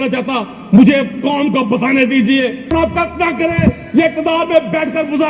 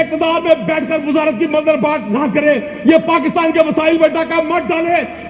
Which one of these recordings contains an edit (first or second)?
first